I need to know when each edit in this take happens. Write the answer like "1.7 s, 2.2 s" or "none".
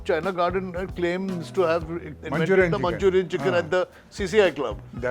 2.2 s